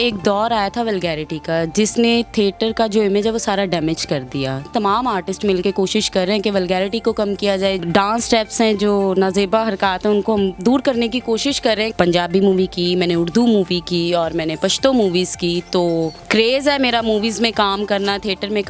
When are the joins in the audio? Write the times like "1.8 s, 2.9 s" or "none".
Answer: 4.7 s, 7.8 s, 11.9 s, 16.2 s